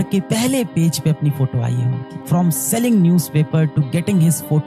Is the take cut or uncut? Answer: uncut